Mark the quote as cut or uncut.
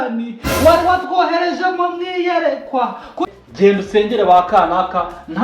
cut